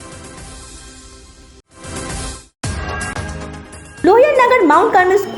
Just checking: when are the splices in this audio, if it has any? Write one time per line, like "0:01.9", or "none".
0:01.6
0:03.3